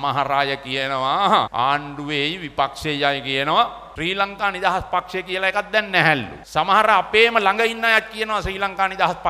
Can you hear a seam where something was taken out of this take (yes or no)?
yes